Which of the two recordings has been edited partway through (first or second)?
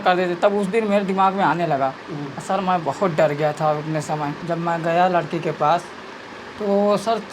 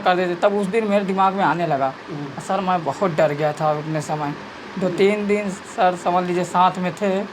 first